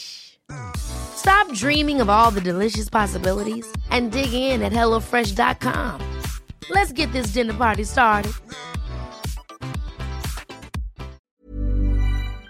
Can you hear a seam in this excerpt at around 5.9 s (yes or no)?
no